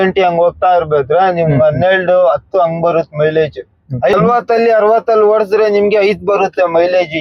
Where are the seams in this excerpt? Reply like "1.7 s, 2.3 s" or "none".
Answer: 4.1 s